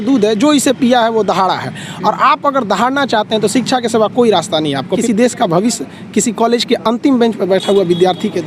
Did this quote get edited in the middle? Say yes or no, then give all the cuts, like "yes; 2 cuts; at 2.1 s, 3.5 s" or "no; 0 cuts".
yes; 1 cut; at 5.0 s